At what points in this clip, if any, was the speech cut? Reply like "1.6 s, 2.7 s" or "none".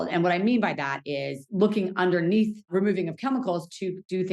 1.4 s, 2.7 s